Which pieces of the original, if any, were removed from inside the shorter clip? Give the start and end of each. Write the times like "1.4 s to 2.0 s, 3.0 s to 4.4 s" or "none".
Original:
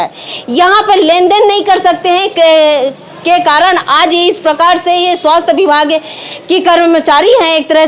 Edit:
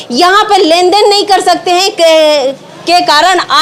none